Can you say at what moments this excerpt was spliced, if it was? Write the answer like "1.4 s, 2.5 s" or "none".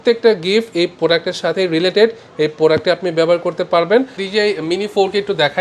4.2 s